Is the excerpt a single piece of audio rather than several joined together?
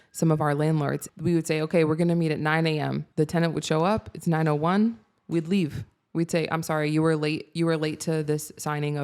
no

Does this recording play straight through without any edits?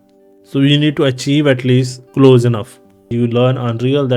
no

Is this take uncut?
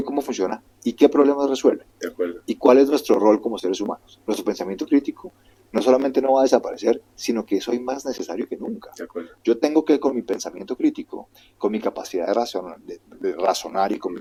yes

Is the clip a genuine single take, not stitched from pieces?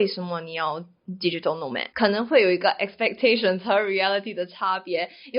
no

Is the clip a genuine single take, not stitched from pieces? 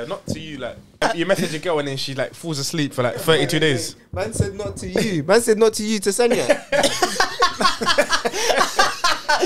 no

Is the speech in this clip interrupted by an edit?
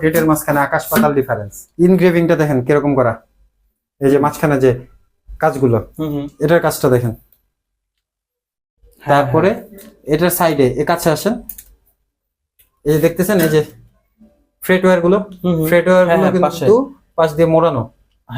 yes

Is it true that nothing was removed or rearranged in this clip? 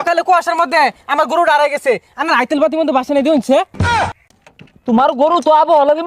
no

